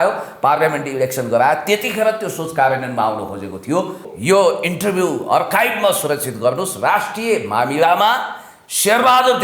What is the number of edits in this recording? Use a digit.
1